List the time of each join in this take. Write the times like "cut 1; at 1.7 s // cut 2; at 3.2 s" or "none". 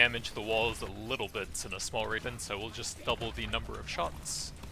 cut 1; at 2.2 s

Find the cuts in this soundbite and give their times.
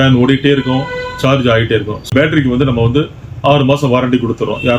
cut 1; at 2.1 s

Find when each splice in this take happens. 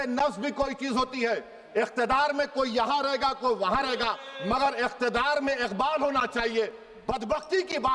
none

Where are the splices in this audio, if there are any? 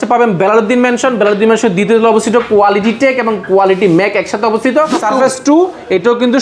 cut 1; at 5.0 s

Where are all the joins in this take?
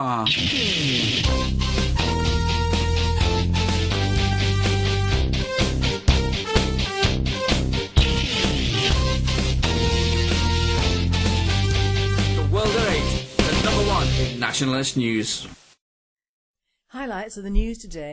none

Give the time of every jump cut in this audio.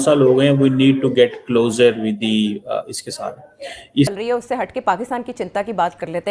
none

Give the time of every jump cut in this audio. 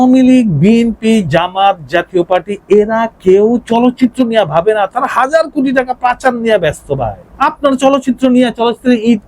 cut 1; at 7.2 s

